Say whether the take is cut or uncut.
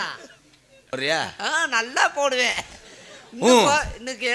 cut